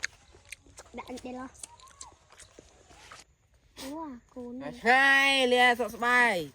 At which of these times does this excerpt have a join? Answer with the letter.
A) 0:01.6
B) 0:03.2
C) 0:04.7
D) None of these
B